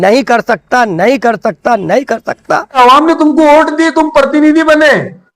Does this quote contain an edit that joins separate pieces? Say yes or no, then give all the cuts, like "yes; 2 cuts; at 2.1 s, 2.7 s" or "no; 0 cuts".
yes; 1 cut; at 2.8 s